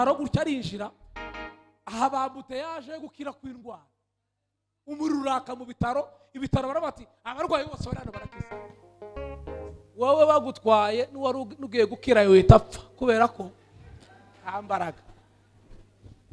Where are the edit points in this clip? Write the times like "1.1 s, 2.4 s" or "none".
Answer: none